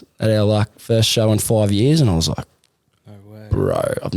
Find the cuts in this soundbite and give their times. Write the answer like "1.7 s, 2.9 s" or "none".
none